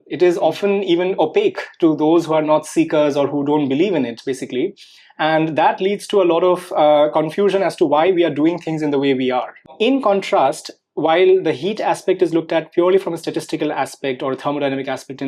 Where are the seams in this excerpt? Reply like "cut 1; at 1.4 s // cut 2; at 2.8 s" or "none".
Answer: cut 1; at 9.7 s